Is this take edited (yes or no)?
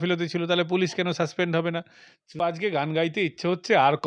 yes